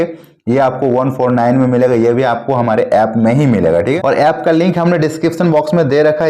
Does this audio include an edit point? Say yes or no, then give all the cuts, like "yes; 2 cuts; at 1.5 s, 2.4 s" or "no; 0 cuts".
yes; 1 cut; at 4.0 s